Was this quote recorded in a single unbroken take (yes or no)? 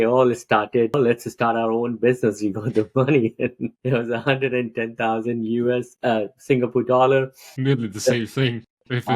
no